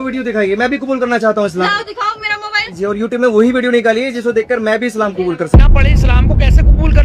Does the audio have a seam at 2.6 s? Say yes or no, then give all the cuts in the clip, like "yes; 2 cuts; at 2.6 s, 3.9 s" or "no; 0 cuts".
no; 1 cut; at 5.5 s